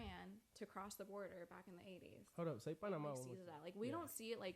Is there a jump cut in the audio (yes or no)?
yes